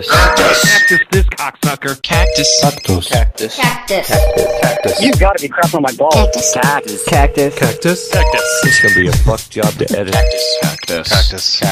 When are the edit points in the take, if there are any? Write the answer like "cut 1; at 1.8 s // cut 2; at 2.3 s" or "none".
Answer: none